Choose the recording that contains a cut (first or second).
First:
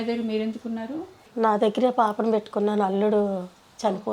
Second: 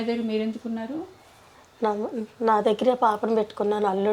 first